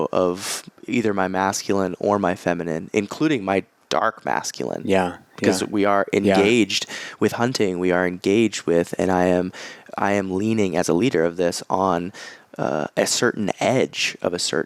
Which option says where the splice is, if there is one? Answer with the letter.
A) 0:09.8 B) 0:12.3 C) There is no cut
C